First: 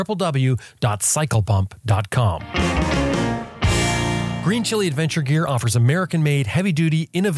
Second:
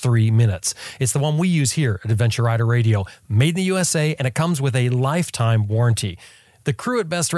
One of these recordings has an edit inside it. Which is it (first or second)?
first